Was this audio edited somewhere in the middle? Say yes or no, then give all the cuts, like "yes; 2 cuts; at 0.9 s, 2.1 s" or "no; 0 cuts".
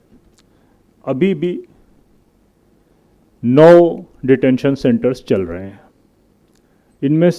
no; 0 cuts